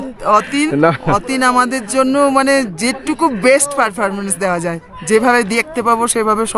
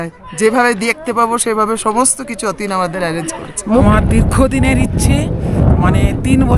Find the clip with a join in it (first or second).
second